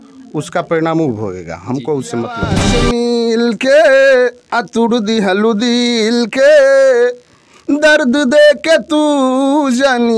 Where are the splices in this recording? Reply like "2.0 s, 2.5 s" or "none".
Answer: 2.6 s